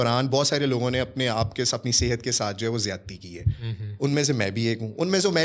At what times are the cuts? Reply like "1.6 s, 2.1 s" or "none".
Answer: none